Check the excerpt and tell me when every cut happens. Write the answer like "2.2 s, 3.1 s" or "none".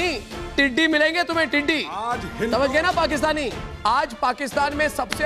3.6 s